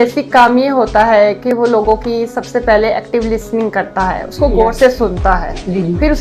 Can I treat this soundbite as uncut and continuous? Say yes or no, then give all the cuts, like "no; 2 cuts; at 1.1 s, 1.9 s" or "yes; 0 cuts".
yes; 0 cuts